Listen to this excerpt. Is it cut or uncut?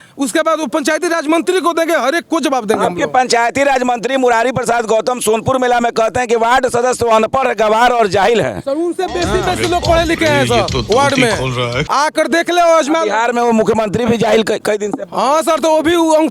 uncut